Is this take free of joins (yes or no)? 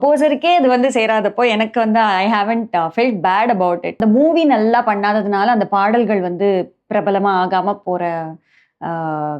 no